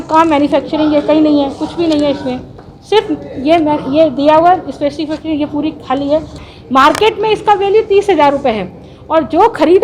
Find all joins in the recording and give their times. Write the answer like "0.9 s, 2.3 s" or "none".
6.4 s